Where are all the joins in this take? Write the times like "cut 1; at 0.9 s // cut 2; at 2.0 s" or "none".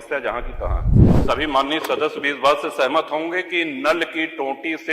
cut 1; at 1.0 s